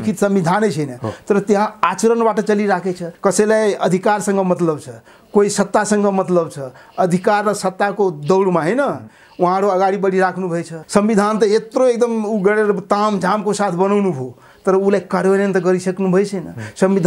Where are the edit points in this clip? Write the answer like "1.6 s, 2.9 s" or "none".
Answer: 3.0 s, 10.7 s